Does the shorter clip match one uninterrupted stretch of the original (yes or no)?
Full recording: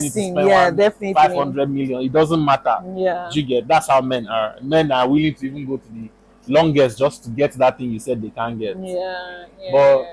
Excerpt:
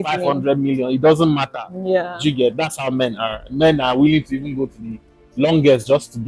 yes